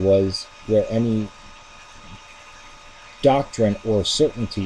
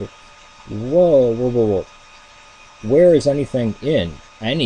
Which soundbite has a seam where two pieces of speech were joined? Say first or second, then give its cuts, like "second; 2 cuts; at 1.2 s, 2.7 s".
first; 1 cut; at 1.8 s